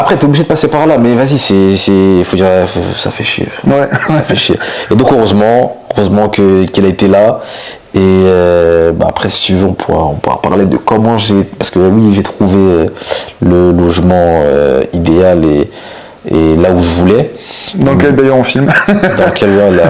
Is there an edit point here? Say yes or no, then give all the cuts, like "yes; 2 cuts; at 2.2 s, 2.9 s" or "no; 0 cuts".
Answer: no; 0 cuts